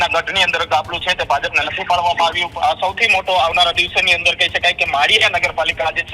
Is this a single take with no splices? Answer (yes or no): no